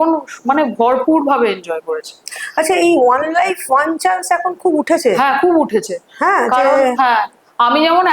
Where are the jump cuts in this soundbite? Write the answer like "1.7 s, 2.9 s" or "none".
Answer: none